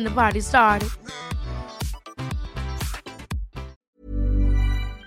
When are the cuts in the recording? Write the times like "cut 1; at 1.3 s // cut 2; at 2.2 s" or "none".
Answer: cut 1; at 3.7 s